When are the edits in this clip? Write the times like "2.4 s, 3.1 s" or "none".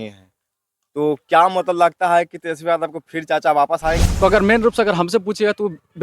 4.1 s